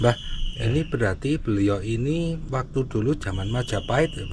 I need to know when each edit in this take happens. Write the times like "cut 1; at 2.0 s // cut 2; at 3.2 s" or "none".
none